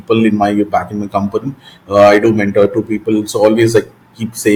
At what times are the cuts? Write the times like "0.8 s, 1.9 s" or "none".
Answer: none